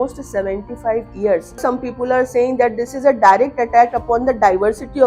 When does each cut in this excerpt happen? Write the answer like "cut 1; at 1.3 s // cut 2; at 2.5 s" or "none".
cut 1; at 1.5 s